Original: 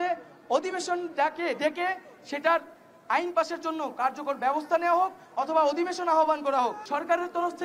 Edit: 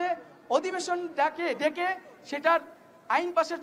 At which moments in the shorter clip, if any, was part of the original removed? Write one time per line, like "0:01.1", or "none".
none